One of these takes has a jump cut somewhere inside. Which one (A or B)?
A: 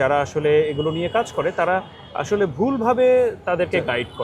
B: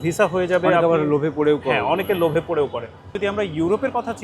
B